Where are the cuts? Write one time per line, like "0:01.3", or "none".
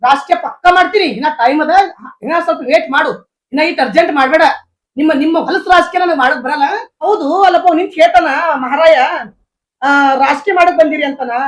0:06.9

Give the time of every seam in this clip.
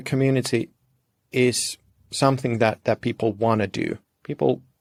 none

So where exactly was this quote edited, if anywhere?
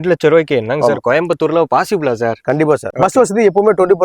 0:02.9

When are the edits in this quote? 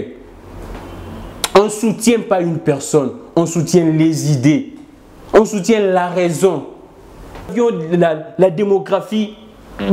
0:07.5

